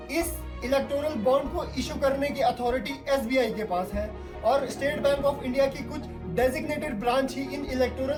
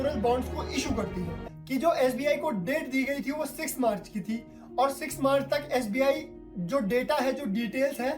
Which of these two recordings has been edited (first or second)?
second